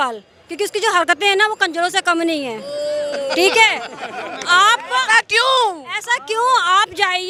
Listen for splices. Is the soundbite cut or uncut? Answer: uncut